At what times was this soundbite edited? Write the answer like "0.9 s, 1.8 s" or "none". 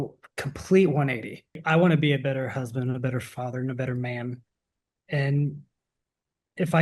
1.6 s